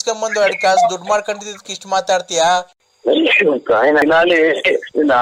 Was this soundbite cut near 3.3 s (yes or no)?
no